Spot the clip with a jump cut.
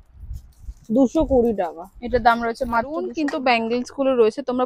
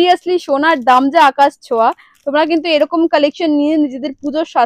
first; 1 cut; at 3.1 s

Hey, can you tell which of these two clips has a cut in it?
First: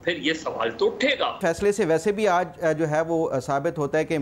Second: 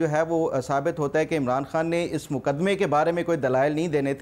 first; 1 cut; at 1.4 s

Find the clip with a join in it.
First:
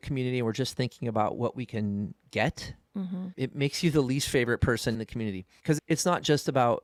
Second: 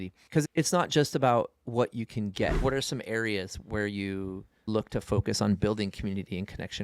second; 2 cuts; at 2.6 s, 4.7 s

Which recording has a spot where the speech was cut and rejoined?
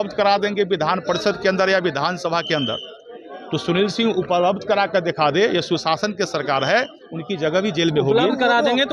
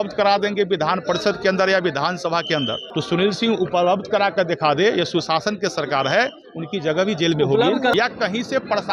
second; 2 cuts; at 2.8 s, 7.9 s

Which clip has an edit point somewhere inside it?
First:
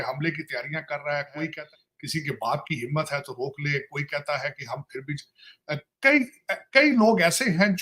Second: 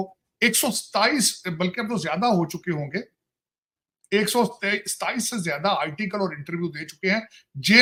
first; 1 cut; at 1.6 s

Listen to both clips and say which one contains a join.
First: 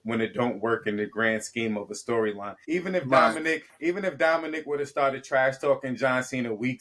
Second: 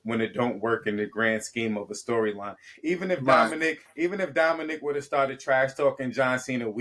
first; 1 cut; at 2.5 s

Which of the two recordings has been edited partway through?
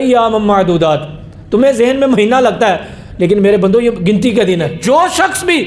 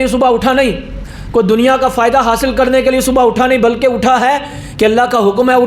first; 1 cut; at 4.8 s

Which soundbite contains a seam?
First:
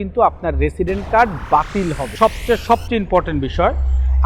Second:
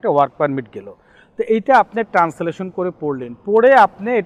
first; 1 cut; at 2.1 s

